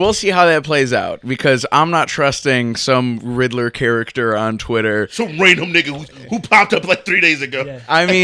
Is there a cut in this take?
no; 0 cuts

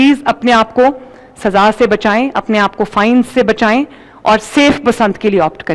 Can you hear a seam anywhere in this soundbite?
no; 0 cuts

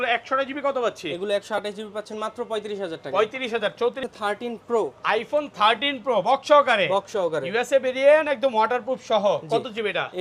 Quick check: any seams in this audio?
yes; 1 cut; at 4.0 s

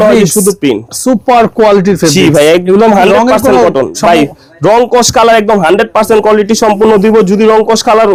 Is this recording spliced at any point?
no; 0 cuts

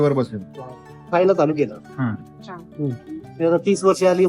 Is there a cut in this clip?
yes; 1 cut; at 1.1 s

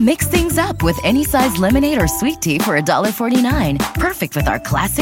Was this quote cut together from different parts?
no; 0 cuts

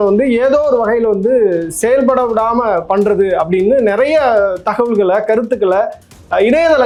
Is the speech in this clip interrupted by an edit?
no; 0 cuts

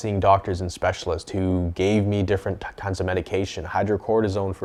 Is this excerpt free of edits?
yes; 0 cuts

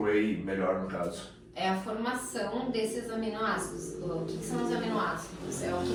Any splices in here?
no; 0 cuts

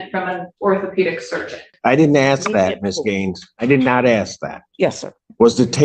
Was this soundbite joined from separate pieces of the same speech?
yes; 1 cut; at 1.7 s

